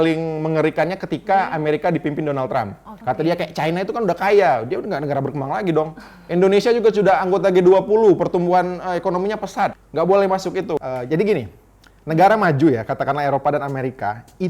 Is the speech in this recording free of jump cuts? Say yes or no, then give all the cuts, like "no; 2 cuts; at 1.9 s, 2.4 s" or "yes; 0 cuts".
no; 3 cuts; at 2.9 s, 9.8 s, 10.8 s